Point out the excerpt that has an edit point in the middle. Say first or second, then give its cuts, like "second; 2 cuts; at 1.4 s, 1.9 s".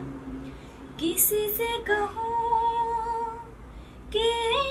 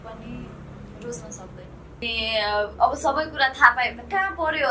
second; 1 cut; at 2.0 s